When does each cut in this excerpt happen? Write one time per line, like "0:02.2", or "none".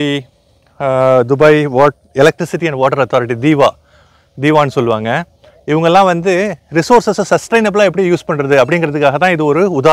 none